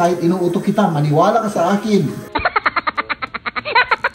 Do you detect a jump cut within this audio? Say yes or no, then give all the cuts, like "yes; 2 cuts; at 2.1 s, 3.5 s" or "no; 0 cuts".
yes; 1 cut; at 2.2 s